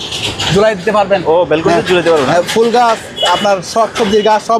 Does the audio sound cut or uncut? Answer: uncut